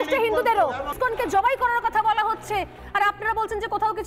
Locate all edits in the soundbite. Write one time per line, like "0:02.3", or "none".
0:00.9